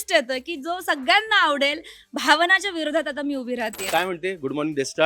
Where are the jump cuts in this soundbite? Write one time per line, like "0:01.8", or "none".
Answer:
0:03.9